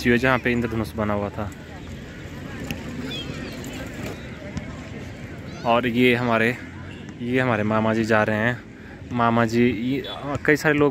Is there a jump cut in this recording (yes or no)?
no